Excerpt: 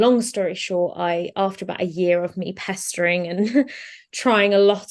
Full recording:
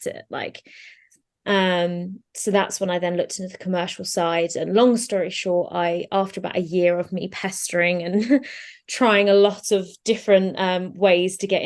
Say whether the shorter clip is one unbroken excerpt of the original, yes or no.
yes